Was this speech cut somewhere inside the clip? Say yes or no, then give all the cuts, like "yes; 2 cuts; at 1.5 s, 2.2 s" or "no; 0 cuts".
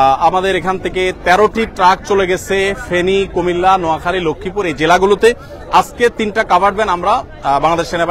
no; 0 cuts